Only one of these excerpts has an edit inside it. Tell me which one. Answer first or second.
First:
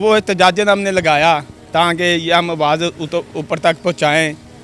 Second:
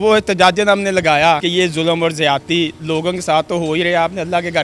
second